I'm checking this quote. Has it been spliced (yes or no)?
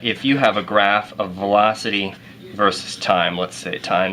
no